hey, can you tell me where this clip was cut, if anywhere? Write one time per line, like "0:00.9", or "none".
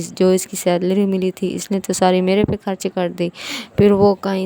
none